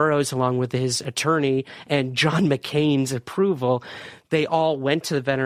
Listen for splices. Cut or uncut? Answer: uncut